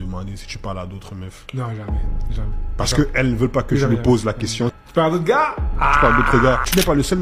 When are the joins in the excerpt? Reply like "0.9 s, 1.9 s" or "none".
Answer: none